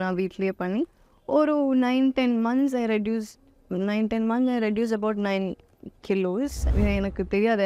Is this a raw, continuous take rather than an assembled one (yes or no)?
no